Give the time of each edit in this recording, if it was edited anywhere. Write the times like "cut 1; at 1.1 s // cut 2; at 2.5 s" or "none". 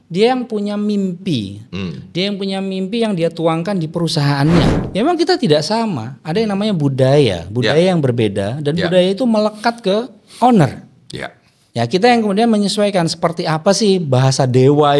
cut 1; at 4.7 s

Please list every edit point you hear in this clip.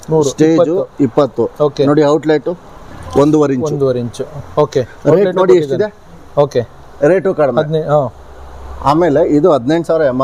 none

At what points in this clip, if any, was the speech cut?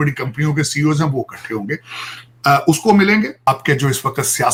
none

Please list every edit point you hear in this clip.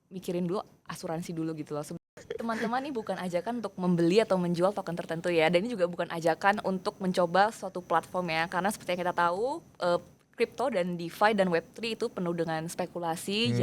cut 1; at 2.2 s

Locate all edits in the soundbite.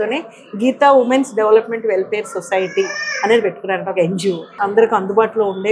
cut 1; at 4.5 s

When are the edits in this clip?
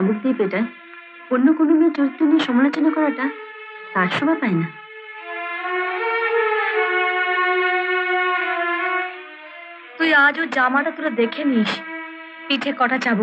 none

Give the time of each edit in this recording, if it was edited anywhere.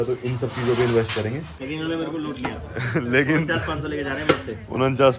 cut 1; at 1.5 s

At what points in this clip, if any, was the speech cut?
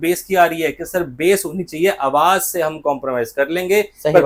none

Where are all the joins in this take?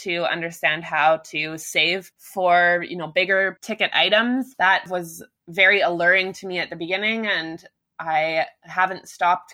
cut 1; at 2.2 s // cut 2; at 3.6 s // cut 3; at 4.9 s

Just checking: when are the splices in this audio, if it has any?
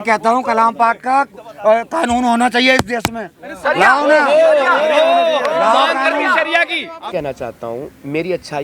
cut 1; at 7.1 s

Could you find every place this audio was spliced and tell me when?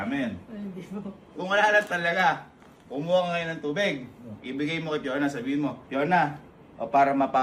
cut 1; at 1.3 s // cut 2; at 5.8 s

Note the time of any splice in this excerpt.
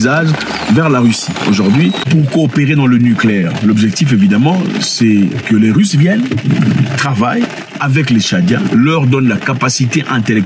none

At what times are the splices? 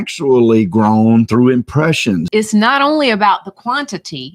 cut 1; at 2.3 s

